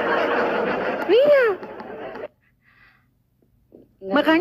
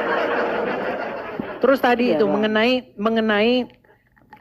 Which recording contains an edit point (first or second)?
first